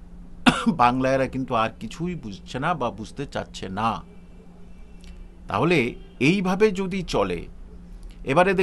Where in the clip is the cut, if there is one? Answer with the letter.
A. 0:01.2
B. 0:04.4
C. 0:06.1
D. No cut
D